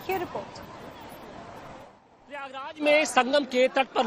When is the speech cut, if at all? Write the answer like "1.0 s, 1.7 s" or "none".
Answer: 1.0 s